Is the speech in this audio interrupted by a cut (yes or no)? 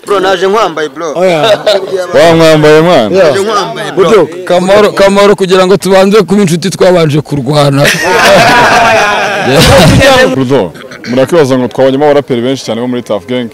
yes